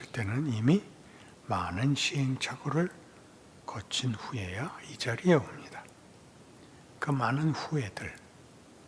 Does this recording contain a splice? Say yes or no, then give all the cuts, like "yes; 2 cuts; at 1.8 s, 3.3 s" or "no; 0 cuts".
no; 0 cuts